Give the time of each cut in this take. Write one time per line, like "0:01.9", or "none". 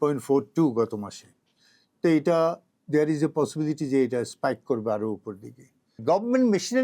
0:05.9